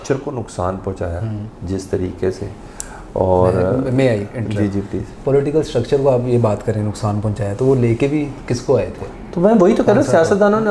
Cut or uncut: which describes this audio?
uncut